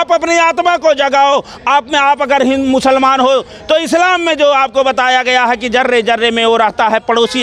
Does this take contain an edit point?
no; 0 cuts

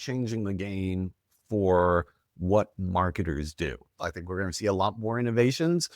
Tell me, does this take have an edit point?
yes; 1 cut; at 4.2 s

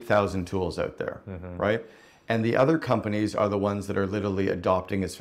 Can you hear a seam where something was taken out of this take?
no; 0 cuts

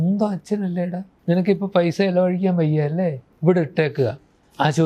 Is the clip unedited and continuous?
no; 2 cuts; at 1.1 s, 3.3 s

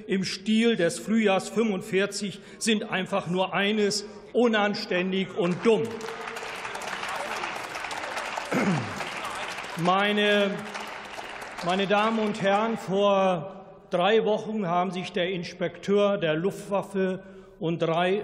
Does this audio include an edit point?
no; 0 cuts

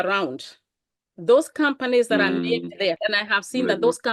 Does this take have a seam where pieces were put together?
yes; 1 cut; at 3.0 s

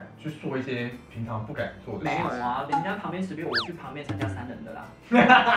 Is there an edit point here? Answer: no; 0 cuts

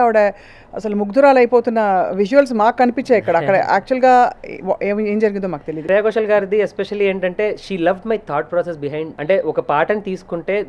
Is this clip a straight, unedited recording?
no; 2 cuts; at 5.8 s, 9.1 s

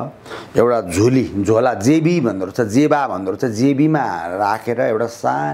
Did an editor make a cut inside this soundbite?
no; 0 cuts

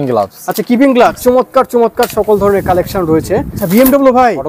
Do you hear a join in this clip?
yes; 2 cuts; at 1.2 s, 3.6 s

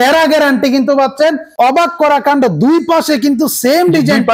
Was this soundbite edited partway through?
yes; 1 cut; at 1.5 s

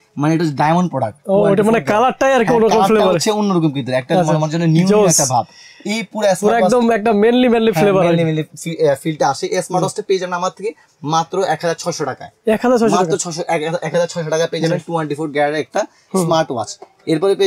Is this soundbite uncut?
yes; 0 cuts

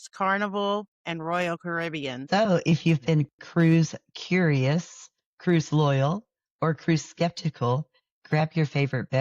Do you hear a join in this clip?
yes; 1 cut; at 2.2 s

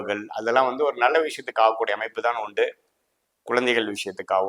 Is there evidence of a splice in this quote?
no; 0 cuts

